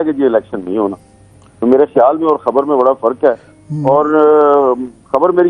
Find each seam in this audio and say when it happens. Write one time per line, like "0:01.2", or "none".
none